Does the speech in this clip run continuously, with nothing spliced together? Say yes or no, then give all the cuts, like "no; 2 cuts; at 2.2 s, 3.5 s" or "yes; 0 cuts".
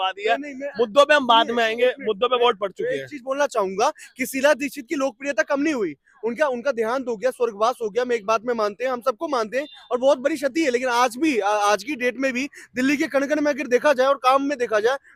yes; 0 cuts